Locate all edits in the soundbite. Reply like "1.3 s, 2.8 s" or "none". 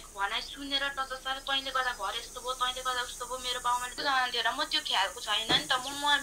4.0 s